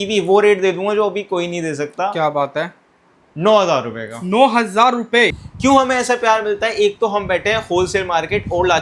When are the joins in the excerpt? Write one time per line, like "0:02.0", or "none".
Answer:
0:05.4